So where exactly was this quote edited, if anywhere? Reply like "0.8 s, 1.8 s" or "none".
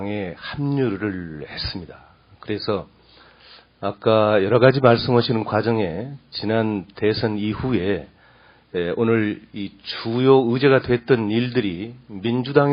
none